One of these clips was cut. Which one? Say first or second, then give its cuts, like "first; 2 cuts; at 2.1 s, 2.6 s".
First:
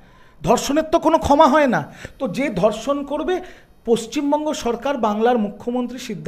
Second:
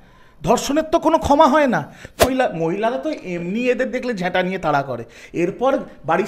second; 1 cut; at 2.2 s